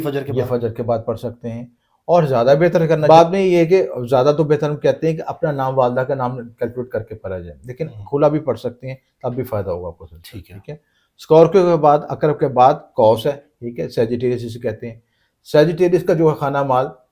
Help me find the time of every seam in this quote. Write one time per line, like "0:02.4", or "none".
0:03.1